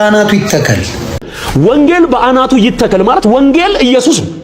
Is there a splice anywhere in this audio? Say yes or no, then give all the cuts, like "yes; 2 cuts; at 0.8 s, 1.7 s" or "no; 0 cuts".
yes; 1 cut; at 1.2 s